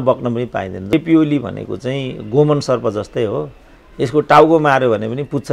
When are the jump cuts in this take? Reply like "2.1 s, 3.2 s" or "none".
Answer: 0.9 s